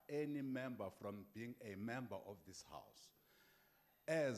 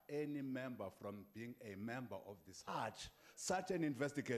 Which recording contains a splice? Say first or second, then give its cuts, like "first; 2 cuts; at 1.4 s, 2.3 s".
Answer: first; 1 cut; at 2.5 s